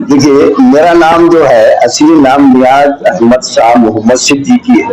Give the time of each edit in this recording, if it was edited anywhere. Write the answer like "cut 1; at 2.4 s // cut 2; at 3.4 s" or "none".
none